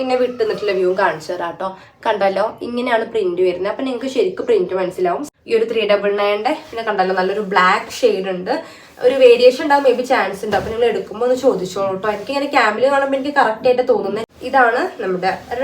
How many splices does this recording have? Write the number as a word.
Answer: two